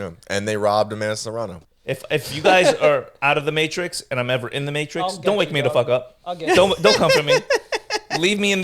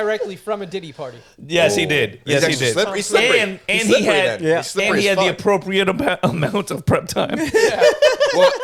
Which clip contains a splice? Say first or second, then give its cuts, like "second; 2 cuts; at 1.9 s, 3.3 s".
first; 1 cut; at 1.6 s